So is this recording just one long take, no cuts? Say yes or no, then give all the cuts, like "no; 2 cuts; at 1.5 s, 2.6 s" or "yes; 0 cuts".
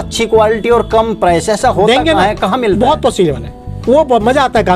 yes; 0 cuts